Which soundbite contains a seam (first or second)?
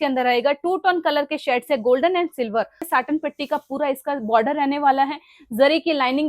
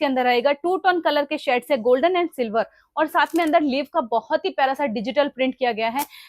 first